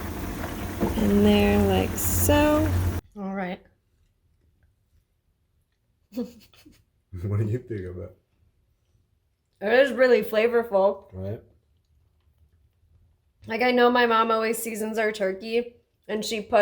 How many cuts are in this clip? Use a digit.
1